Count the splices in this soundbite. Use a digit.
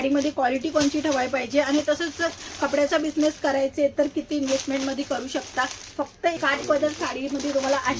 1